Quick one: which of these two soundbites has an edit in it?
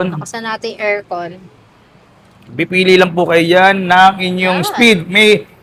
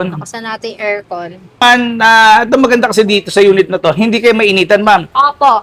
second; 1 cut; at 1.6 s

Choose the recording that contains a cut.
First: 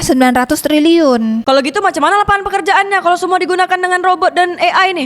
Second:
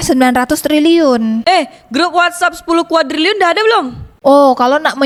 first; 1 cut; at 1.4 s

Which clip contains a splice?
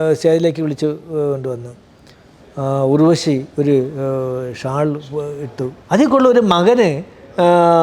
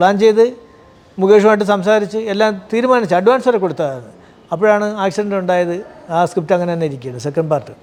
first; 1 cut; at 5.8 s

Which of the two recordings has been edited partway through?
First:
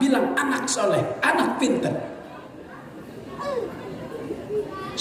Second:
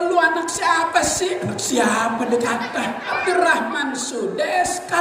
second; 1 cut; at 3.2 s

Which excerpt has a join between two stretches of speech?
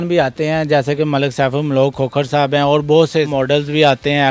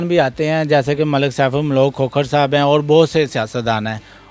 first; 1 cut; at 3.3 s

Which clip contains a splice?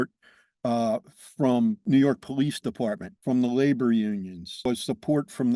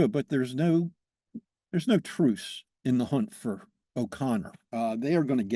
first; 3 cuts; at 1.8 s, 3.1 s, 4.7 s

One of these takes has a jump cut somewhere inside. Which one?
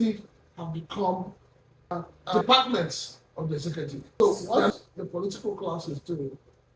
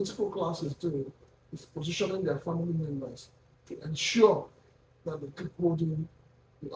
first; 2 cuts; at 2.1 s, 4.2 s

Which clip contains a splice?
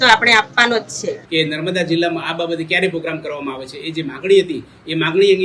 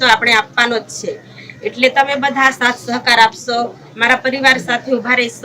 first; 1 cut; at 1.2 s

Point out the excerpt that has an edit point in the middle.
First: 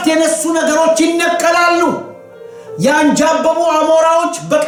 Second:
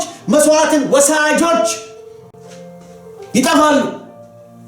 second; 1 cut; at 3.3 s

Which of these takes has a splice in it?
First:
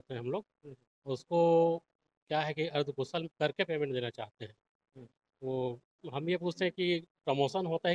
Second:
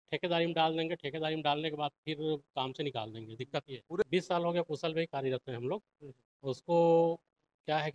second; 1 cut; at 4.1 s

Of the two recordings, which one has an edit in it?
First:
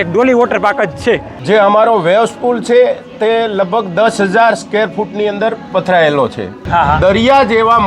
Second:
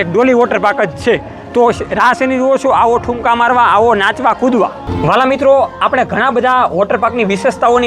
first; 2 cuts; at 1.3 s, 6.6 s

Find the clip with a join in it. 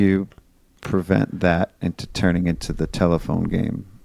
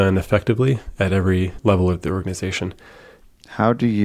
second; 2 cuts; at 1.5 s, 3.1 s

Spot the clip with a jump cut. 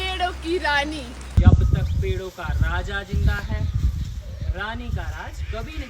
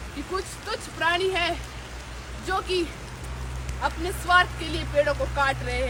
first; 1 cut; at 1.4 s

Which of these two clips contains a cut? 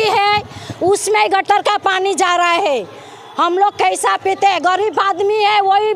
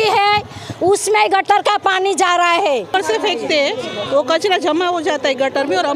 second; 1 cut; at 2.9 s

